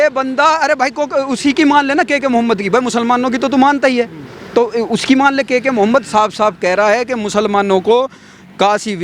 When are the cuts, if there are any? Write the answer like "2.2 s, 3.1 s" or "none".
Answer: none